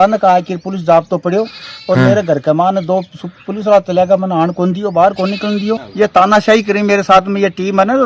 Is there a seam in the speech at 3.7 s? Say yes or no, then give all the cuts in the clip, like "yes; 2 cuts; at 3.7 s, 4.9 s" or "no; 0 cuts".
no; 1 cut; at 5.9 s